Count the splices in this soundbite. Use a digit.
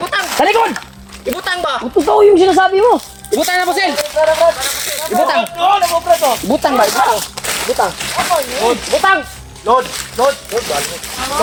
0